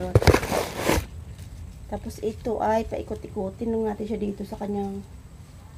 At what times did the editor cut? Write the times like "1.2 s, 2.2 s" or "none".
1.0 s